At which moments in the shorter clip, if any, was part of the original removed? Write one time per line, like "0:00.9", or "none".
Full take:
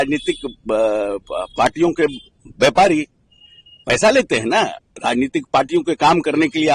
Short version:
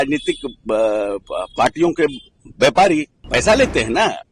0:03.2